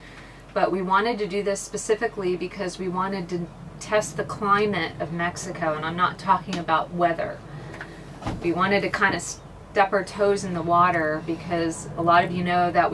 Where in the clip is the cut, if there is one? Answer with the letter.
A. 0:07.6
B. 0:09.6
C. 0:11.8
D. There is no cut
D